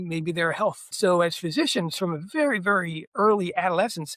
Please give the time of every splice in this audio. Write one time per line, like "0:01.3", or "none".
0:00.9